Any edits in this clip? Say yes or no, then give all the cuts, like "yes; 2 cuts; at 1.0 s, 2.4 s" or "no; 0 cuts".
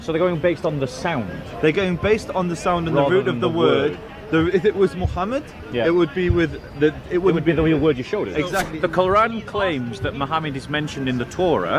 yes; 1 cut; at 8.6 s